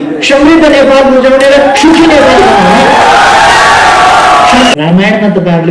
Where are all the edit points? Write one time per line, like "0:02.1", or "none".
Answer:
0:04.7

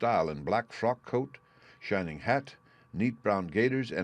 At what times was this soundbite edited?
0:02.5

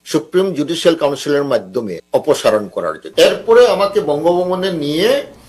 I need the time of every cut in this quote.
0:02.0
0:03.0

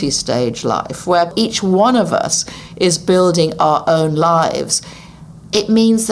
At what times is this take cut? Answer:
0:01.3

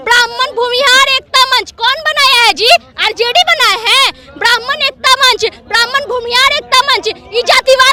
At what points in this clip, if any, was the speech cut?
none

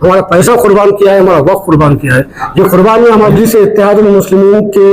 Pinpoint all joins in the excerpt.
0:03.3

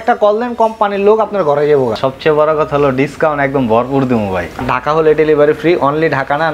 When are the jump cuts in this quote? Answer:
0:02.0
0:04.6

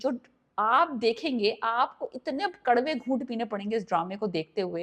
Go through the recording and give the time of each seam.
none

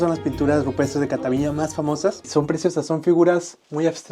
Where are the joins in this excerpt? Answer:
0:02.2

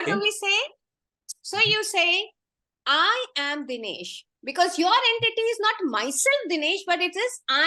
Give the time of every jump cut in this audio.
none

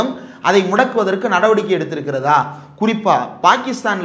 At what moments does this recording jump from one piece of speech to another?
none

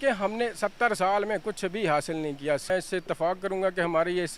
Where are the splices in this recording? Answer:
0:02.7

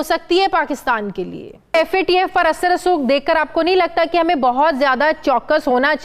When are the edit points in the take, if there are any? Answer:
0:01.7

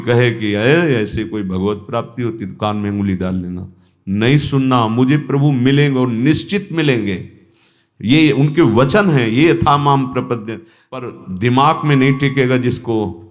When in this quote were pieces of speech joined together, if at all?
0:11.1

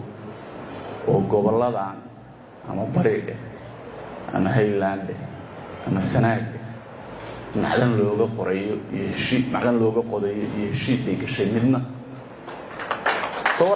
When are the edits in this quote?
none

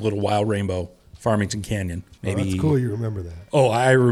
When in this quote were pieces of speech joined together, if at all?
none

